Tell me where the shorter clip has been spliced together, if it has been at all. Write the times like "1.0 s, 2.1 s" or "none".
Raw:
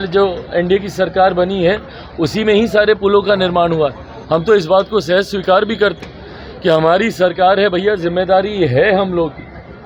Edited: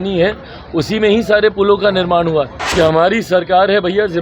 2.6 s